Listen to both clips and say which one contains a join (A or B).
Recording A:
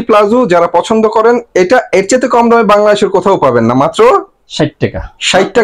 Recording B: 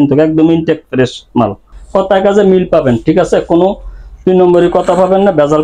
B